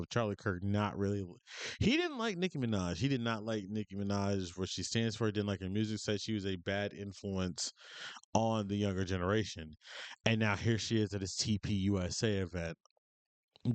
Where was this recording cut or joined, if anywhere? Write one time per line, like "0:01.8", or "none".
none